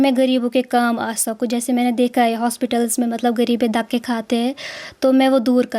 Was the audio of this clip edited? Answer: no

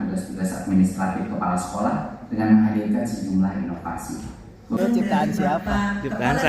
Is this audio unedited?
no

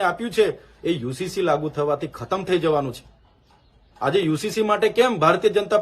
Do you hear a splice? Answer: no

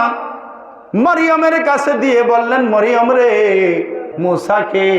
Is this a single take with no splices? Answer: no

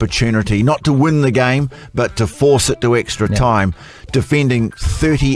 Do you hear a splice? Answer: no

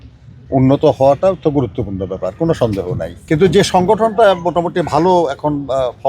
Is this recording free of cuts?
no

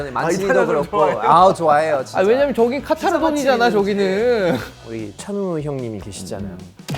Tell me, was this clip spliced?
yes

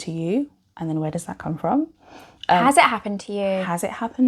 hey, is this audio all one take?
yes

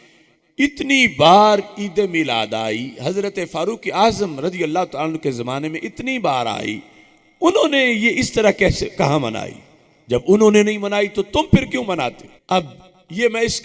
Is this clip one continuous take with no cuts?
no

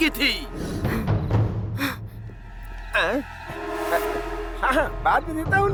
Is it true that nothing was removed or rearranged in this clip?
yes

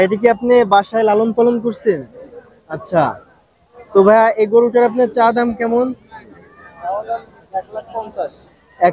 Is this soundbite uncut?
yes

